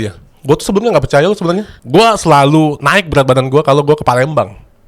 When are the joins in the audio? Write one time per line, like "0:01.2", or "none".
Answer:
0:01.7